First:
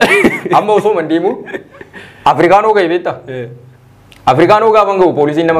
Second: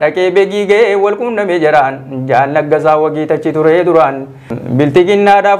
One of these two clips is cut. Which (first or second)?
second